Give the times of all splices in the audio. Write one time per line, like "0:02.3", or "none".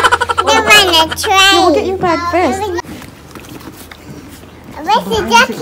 0:02.8